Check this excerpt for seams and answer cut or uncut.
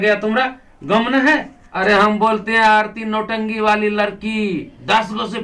cut